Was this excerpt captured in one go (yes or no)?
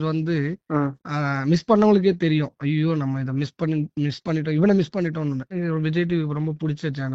no